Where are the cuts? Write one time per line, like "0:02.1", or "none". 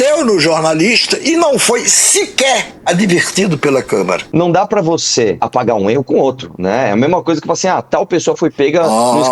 0:04.2
0:05.4